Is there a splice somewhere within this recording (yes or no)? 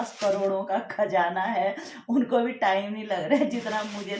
no